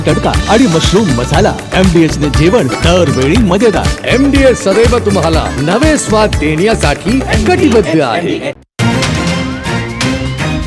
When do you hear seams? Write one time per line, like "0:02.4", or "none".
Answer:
0:08.6